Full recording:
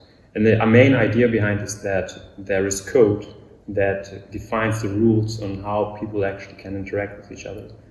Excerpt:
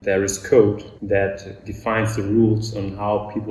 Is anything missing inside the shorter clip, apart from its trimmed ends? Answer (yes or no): yes